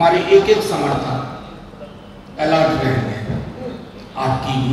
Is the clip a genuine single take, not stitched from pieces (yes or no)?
yes